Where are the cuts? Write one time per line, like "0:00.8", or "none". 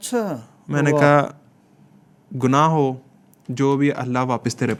none